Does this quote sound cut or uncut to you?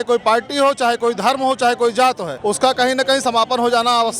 cut